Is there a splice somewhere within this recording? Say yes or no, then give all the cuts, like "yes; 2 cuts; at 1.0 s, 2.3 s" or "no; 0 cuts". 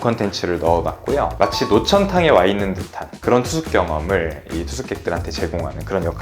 yes; 1 cut; at 1.3 s